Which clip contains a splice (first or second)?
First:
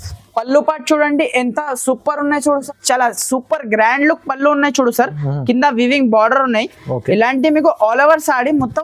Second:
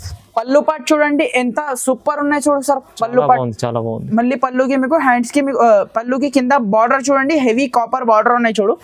first